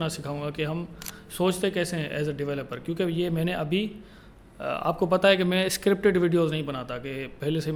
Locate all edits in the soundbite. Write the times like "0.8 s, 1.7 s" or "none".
none